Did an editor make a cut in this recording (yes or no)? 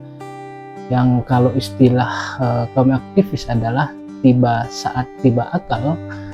no